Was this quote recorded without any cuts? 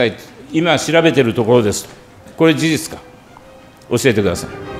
no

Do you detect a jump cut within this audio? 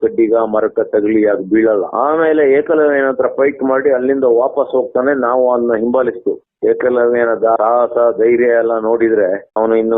yes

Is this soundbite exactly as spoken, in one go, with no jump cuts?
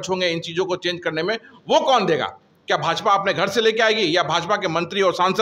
yes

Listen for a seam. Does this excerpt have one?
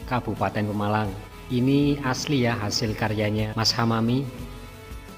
yes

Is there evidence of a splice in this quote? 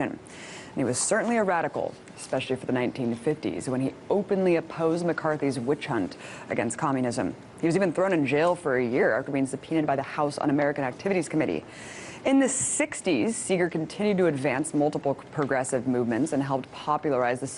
no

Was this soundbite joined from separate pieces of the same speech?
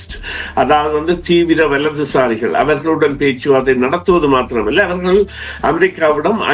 no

